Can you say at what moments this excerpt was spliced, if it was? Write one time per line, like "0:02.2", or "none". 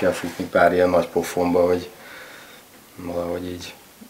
none